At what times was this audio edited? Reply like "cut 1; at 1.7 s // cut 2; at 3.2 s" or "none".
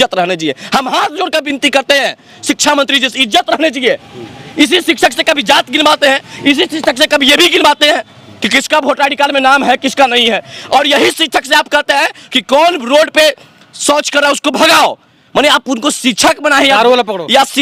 none